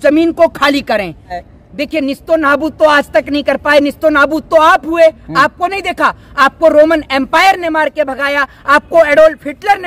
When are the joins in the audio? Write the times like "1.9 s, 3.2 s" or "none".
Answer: 1.4 s